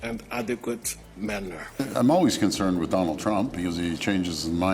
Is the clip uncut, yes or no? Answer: no